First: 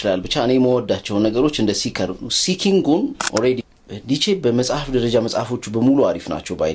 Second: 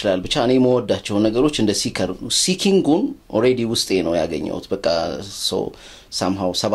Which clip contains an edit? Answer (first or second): first